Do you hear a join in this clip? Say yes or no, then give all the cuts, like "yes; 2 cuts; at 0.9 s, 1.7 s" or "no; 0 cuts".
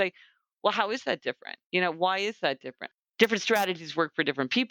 yes; 2 cuts; at 1.5 s, 2.7 s